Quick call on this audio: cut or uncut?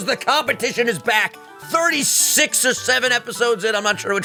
uncut